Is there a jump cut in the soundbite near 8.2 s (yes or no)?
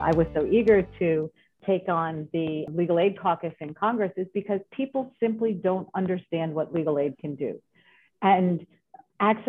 no